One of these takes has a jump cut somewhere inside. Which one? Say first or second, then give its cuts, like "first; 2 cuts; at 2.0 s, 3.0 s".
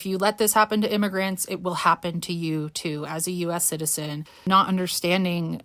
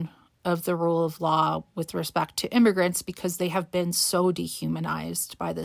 first; 1 cut; at 4.4 s